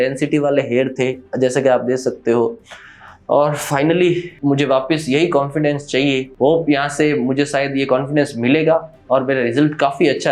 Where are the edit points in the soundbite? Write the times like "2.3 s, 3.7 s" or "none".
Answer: 4.3 s

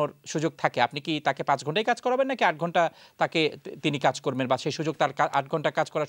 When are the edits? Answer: none

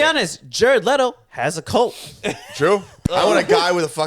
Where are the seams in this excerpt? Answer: 3.0 s

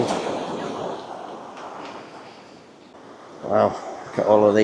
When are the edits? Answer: 2.8 s

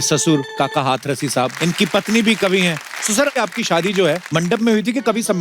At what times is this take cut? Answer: 1.5 s, 3.3 s, 4.2 s

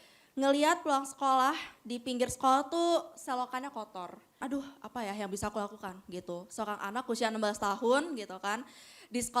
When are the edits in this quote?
4.4 s

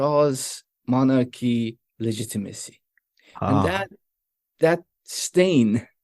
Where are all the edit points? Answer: 4.4 s

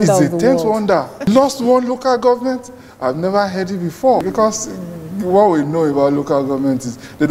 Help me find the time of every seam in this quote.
1.3 s, 4.3 s

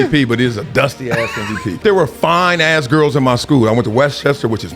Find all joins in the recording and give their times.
1.8 s

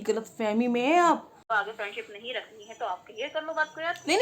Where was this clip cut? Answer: 1.3 s

